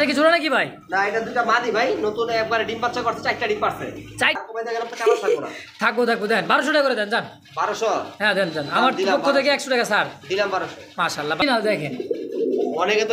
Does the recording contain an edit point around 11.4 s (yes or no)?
yes